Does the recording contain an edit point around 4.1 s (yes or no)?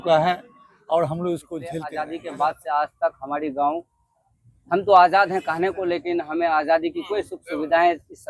no